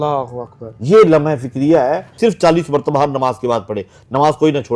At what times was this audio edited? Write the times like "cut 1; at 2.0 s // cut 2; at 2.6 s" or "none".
cut 1; at 2.2 s